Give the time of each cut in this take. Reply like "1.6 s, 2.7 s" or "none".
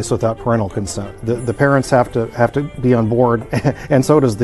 1.1 s